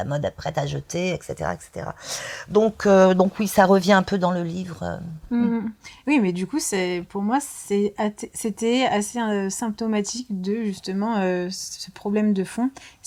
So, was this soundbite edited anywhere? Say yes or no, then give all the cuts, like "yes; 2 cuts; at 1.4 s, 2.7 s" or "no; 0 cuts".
no; 0 cuts